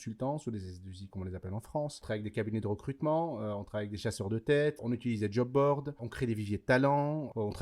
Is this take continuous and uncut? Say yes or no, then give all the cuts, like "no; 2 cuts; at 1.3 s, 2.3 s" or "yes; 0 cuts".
no; 3 cuts; at 2.0 s, 4.8 s, 6.0 s